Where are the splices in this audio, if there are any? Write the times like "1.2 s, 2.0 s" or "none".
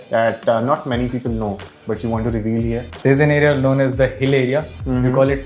2.9 s

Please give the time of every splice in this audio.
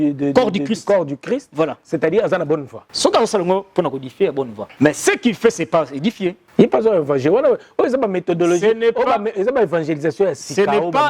2.8 s, 4.6 s, 6.4 s

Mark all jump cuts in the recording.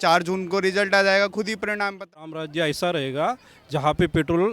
2.2 s

